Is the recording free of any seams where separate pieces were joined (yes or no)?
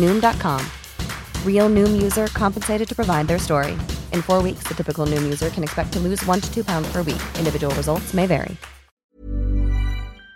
no